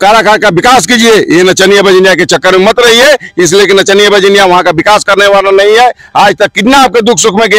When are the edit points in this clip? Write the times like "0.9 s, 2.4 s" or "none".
none